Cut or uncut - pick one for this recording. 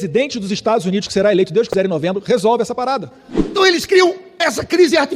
cut